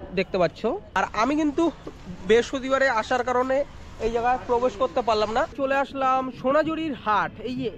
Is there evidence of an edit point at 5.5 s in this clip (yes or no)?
yes